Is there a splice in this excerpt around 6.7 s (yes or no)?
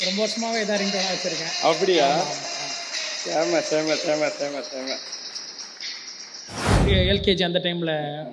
yes